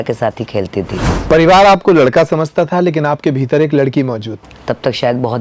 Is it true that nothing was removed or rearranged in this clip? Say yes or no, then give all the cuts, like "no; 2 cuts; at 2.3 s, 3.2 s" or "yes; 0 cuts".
no; 2 cuts; at 1.1 s, 4.5 s